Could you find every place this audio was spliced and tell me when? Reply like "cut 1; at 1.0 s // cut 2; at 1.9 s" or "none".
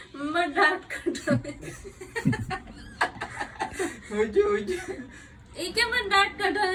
none